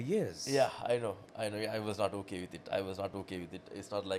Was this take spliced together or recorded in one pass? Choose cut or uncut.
uncut